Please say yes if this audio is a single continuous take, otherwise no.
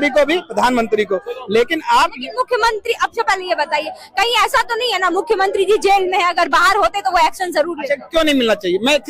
yes